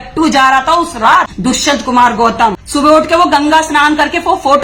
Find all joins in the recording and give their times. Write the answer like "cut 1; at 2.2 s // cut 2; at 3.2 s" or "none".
cut 1; at 1.3 s // cut 2; at 2.6 s